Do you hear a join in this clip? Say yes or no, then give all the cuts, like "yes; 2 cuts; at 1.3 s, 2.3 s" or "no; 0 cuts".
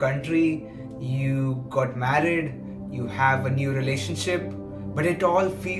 no; 0 cuts